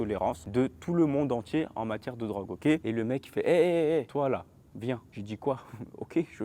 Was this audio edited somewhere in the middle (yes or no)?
yes